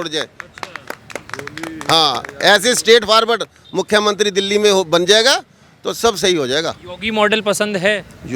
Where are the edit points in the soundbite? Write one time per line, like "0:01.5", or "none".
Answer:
none

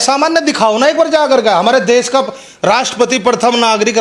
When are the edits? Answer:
none

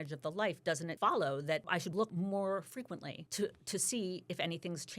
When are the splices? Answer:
0:00.9
0:02.1
0:03.2

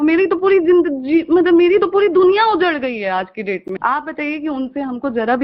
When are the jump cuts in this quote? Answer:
0:03.7

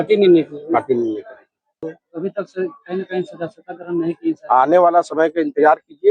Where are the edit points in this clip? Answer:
0:02.0

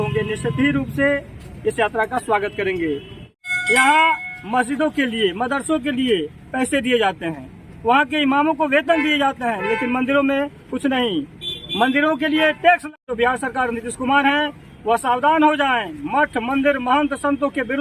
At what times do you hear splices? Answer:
0:03.2
0:12.9

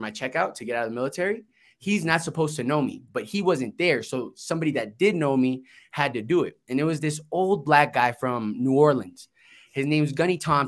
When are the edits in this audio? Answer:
none

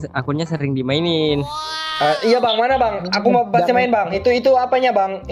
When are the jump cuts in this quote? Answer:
0:04.1

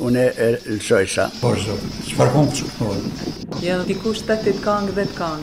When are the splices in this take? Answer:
0:01.3

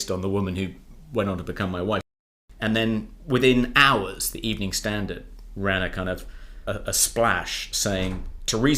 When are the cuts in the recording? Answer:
0:02.1
0:06.6

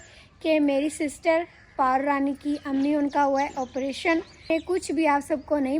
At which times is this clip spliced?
0:04.5

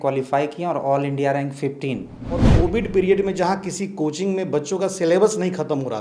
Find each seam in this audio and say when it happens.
0:02.5

